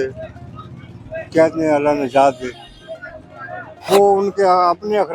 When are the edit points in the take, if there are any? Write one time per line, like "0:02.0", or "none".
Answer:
0:03.7